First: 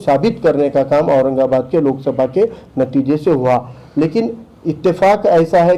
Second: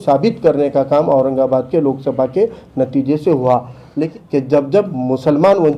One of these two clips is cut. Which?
second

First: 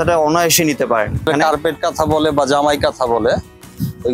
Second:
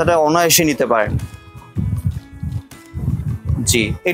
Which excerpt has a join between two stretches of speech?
first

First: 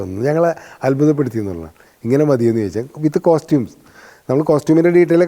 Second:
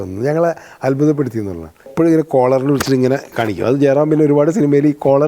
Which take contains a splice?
second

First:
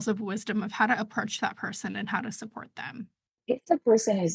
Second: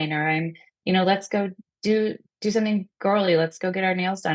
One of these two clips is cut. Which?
first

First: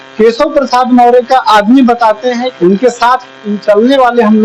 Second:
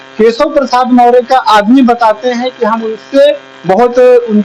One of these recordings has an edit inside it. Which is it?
first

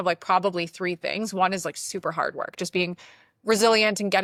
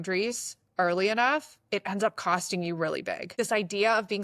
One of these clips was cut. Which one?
second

